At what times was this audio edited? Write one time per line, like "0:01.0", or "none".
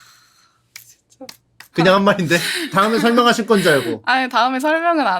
0:01.6
0:02.7